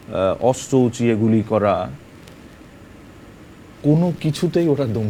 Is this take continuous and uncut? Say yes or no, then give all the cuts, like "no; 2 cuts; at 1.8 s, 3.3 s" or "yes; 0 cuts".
yes; 0 cuts